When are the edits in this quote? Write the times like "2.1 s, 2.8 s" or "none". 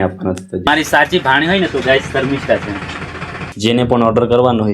0.7 s, 3.5 s